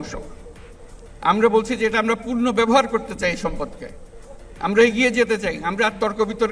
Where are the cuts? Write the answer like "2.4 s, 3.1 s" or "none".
none